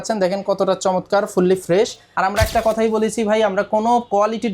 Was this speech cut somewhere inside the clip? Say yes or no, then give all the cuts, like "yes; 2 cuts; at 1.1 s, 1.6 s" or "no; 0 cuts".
yes; 1 cut; at 2.0 s